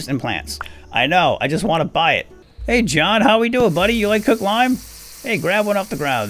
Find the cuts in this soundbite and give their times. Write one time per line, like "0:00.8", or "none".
0:02.6